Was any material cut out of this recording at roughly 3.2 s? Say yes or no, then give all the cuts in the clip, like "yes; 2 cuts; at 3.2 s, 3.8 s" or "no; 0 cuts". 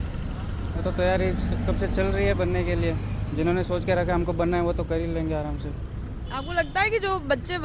no; 0 cuts